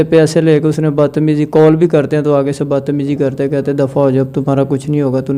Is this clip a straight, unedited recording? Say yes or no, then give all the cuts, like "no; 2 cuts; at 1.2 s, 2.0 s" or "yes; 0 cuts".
yes; 0 cuts